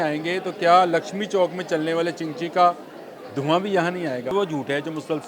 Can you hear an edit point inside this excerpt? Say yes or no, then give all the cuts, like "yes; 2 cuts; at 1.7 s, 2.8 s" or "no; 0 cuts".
yes; 1 cut; at 4.3 s